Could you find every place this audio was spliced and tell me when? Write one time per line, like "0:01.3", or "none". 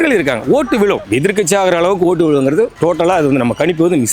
0:01.0
0:02.7